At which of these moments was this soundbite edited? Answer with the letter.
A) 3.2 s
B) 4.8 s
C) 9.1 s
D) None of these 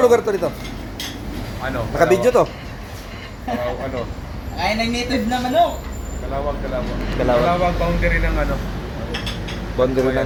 D